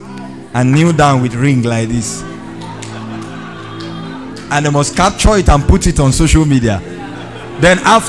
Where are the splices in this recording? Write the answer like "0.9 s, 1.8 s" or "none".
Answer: none